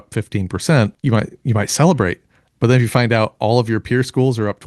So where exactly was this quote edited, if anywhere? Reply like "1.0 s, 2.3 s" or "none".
1.0 s

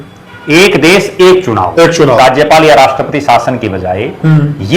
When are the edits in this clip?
2.2 s

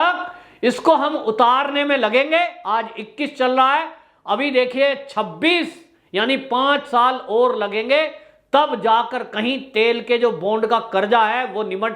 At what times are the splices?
none

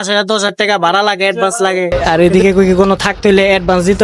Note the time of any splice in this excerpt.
1.9 s

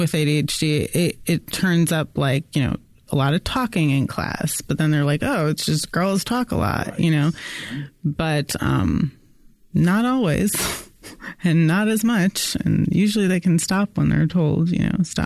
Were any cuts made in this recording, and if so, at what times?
none

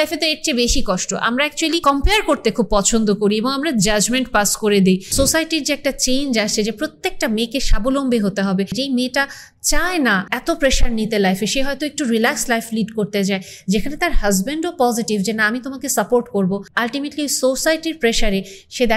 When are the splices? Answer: 1.8 s, 5.1 s, 8.7 s, 10.3 s, 16.7 s

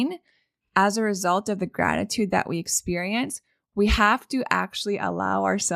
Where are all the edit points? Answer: none

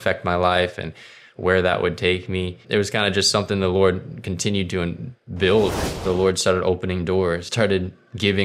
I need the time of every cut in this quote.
2.6 s, 5.8 s, 7.5 s

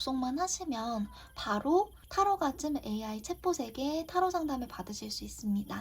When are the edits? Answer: 2.0 s

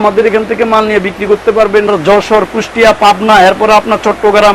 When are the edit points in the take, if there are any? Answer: 1.9 s

